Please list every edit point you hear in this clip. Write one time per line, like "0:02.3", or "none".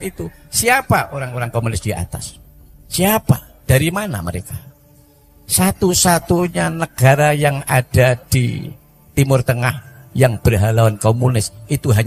none